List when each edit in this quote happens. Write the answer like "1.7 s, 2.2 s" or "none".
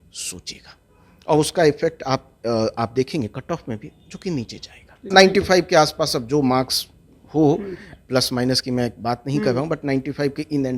5.1 s